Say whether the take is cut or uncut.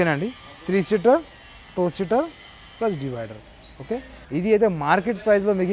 cut